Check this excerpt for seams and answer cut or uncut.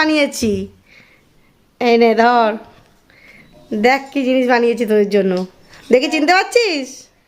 cut